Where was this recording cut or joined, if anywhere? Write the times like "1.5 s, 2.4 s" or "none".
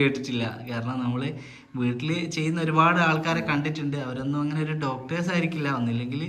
none